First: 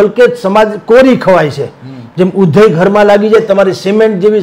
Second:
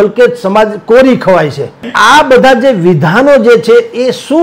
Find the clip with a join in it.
second; 1 cut; at 1.9 s

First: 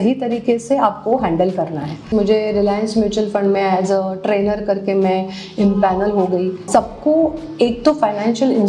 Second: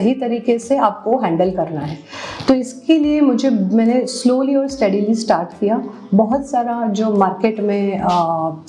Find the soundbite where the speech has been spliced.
first; 2 cuts; at 2.0 s, 6.6 s

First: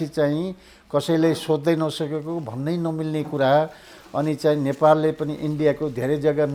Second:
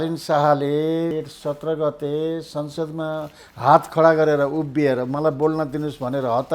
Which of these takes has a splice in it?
second; 1 cut; at 1.1 s

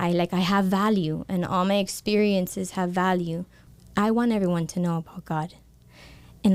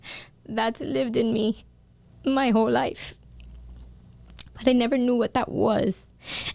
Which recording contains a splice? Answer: first; 1 cut; at 3.6 s

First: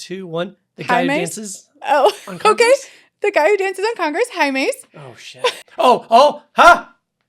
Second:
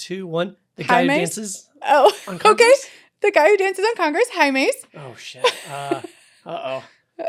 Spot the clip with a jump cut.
first; 1 cut; at 5.6 s

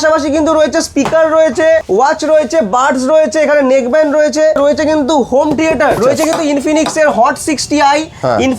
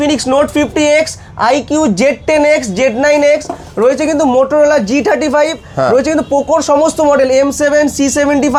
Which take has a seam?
first; 3 cuts; at 1.9 s, 4.6 s, 6.0 s

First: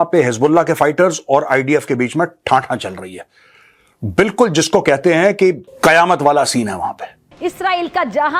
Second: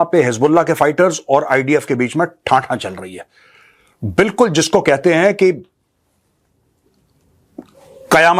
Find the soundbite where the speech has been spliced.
first; 2 cuts; at 5.7 s, 7.3 s

